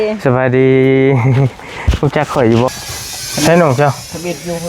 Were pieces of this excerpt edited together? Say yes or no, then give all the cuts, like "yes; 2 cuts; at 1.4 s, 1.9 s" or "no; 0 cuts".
yes; 1 cut; at 2.7 s